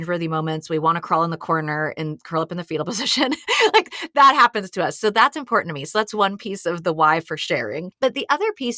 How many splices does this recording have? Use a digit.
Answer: 1